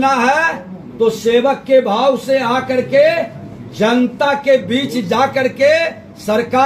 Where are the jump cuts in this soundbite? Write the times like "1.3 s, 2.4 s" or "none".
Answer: none

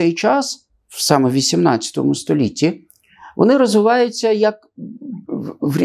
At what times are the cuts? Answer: none

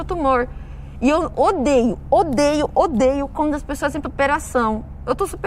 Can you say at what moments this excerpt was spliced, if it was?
4.0 s

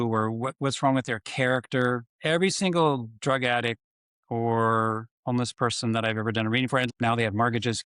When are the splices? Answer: 6.9 s

